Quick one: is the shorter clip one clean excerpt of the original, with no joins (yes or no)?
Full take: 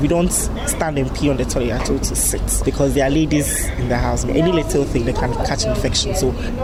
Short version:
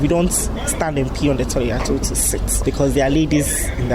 yes